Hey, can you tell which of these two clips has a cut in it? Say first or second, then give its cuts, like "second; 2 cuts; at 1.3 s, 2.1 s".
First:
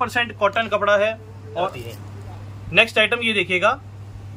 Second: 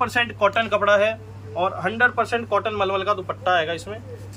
first; 1 cut; at 1.8 s